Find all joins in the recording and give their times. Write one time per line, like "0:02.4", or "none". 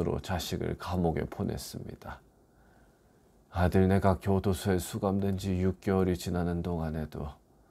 0:03.3

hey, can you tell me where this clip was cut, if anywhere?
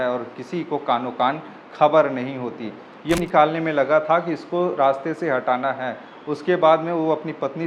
0:03.2

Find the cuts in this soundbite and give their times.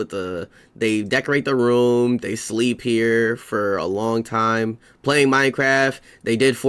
none

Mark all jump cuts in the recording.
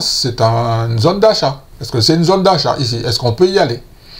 none

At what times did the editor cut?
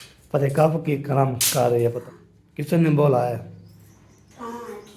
0:02.0

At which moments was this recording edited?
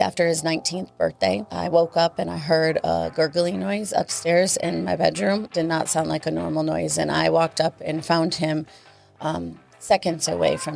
0:01.5
0:05.5

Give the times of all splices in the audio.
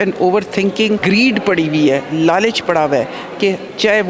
0:01.0

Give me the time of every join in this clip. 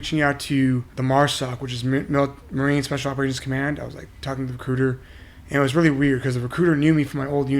0:00.9

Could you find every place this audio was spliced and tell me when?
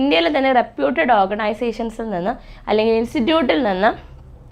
none

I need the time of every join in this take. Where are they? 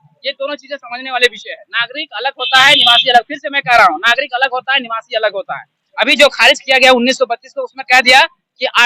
0:05.8

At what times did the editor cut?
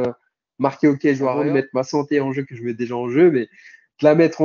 0:01.4

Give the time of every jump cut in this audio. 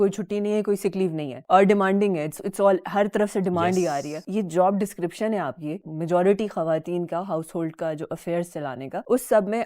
0:01.3

